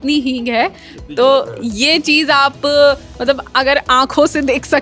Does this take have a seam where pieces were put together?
no; 0 cuts

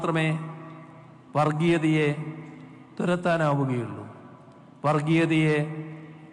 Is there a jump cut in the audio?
no; 0 cuts

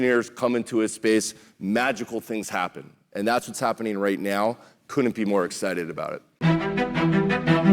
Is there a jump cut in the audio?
yes; 1 cut; at 6.3 s

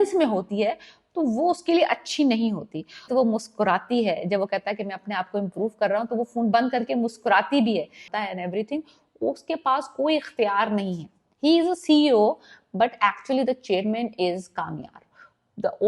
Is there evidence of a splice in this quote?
yes; 2 cuts; at 3.1 s, 8.1 s

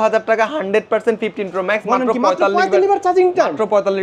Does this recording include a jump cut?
no; 0 cuts

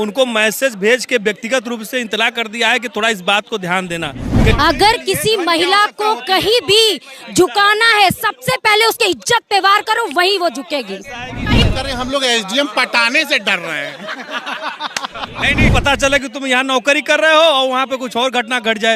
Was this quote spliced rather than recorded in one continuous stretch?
yes; 3 cuts; at 4.5 s, 11.6 s, 15.7 s

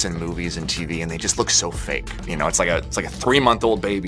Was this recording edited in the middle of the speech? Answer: no; 0 cuts

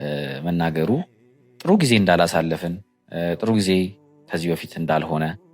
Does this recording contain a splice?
no; 0 cuts

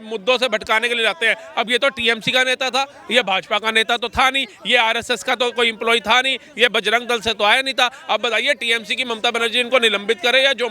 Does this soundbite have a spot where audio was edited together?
no; 0 cuts

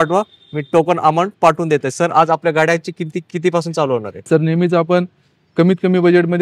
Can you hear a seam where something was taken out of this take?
no; 0 cuts

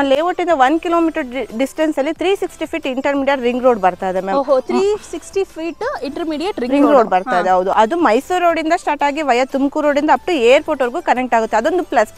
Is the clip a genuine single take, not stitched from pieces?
yes; 0 cuts

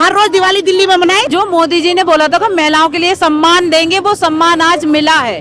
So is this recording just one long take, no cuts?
no; 1 cut; at 1.3 s

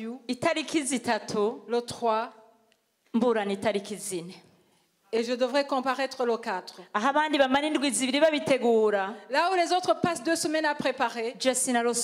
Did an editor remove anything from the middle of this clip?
no; 0 cuts

